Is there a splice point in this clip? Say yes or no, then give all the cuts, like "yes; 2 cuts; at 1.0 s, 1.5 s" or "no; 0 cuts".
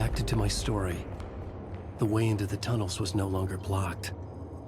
yes; 1 cut; at 2.2 s